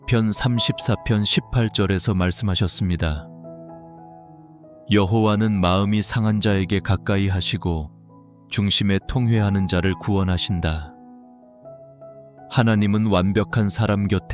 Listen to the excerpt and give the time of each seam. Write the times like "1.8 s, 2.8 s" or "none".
3.2 s, 4.8 s